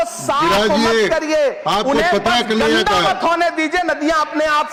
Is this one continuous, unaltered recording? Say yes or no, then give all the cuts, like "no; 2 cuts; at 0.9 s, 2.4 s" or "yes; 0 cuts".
yes; 0 cuts